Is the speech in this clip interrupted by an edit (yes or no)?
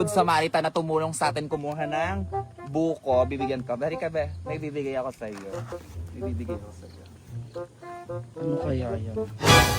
yes